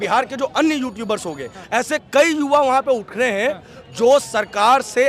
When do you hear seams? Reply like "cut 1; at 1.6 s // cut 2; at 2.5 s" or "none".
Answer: cut 1; at 1.6 s